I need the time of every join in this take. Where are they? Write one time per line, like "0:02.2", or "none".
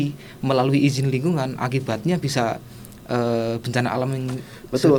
none